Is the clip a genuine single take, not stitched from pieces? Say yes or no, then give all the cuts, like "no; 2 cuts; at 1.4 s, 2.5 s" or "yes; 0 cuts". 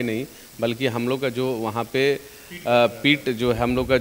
yes; 0 cuts